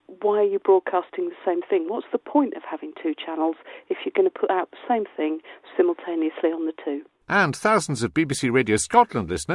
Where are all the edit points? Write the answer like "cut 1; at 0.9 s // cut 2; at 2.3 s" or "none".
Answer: cut 1; at 7.1 s